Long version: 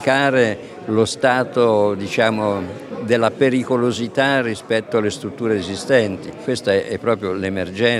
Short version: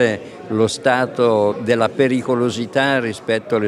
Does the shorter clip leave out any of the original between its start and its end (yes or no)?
yes